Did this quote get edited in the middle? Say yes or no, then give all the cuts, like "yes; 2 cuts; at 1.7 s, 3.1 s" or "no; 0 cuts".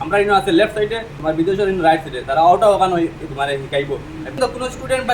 yes; 2 cuts; at 1.1 s, 4.4 s